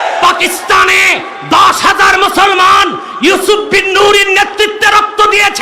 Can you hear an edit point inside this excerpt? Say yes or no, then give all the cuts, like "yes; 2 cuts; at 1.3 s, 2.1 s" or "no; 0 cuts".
no; 0 cuts